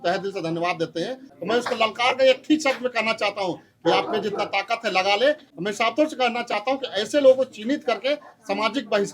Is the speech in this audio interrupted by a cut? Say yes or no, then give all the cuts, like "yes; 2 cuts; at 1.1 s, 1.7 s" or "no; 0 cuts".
yes; 2 cuts; at 1.3 s, 5.5 s